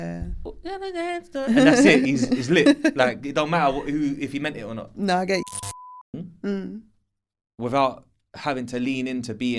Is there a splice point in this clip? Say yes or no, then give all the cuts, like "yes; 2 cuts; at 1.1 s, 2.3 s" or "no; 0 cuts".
yes; 1 cut; at 6.0 s